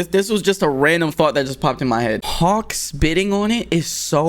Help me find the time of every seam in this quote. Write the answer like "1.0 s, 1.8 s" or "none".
2.3 s